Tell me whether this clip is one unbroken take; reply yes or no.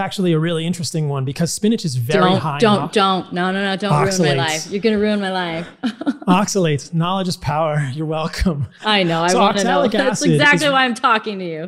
yes